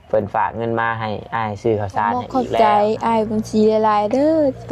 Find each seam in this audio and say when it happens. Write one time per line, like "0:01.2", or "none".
0:02.4